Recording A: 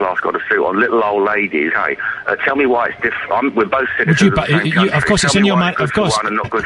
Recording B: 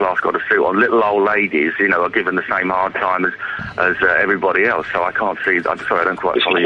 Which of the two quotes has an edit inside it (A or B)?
B